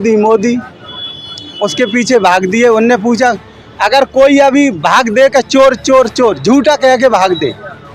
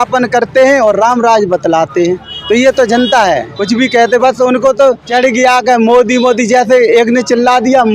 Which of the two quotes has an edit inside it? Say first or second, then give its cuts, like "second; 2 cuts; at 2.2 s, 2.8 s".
second; 3 cuts; at 2.3 s, 3.5 s, 5.0 s